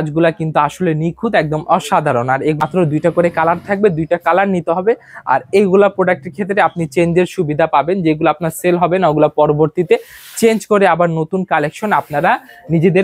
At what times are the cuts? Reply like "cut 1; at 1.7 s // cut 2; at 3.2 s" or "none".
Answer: cut 1; at 2.6 s